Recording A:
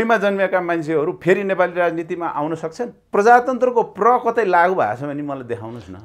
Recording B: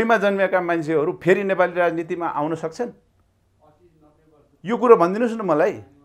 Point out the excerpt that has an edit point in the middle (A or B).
A